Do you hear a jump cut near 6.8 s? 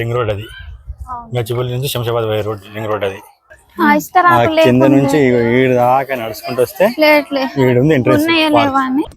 no; 1 cut; at 3.6 s

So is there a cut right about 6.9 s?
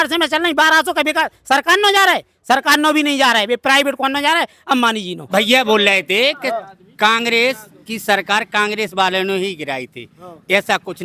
no; 1 cut; at 5.3 s

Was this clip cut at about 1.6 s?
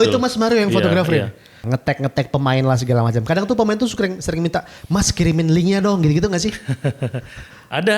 yes; 1 cut; at 1.6 s

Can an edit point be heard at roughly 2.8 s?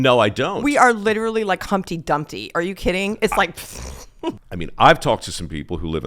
no; 1 cut; at 4.5 s

